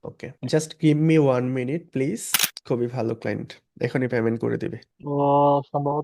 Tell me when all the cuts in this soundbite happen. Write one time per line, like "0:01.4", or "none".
0:02.5